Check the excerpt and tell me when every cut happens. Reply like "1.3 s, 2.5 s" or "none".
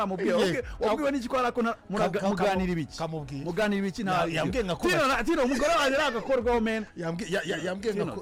none